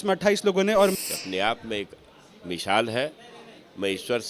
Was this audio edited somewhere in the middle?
yes; 1 cut; at 0.9 s

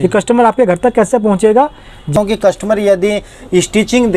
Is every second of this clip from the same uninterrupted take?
no; 1 cut; at 2.1 s

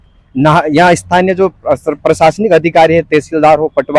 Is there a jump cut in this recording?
no; 0 cuts

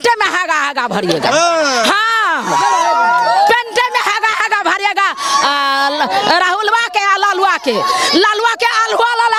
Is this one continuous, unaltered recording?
yes; 0 cuts

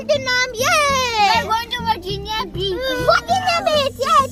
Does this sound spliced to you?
no; 0 cuts

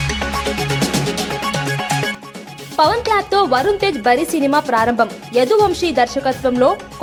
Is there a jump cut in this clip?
no; 0 cuts

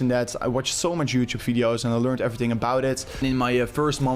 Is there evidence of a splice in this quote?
yes; 1 cut; at 3.2 s

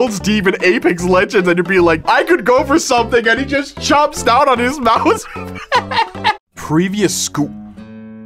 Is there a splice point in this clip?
yes; 1 cut; at 6.4 s

